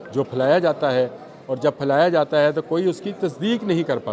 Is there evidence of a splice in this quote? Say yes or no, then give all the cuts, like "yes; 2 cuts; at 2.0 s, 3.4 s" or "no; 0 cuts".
no; 0 cuts